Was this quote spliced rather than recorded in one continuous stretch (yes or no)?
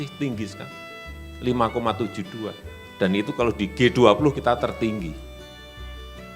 yes